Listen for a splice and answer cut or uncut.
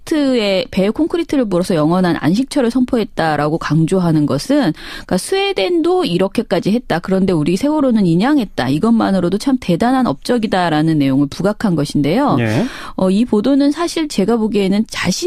uncut